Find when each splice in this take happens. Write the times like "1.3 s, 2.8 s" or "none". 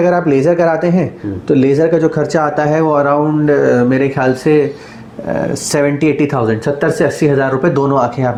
none